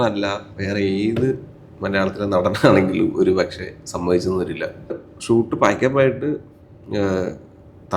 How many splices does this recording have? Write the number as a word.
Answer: one